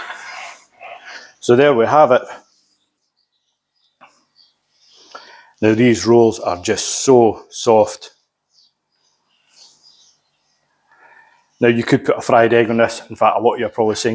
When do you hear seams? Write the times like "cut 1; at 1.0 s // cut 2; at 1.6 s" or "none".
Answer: cut 1; at 3.0 s